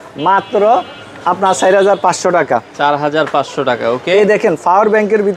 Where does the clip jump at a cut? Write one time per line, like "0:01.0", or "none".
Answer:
none